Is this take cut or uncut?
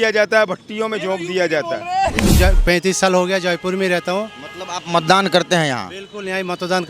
cut